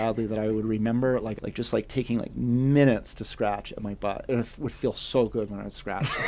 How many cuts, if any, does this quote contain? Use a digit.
2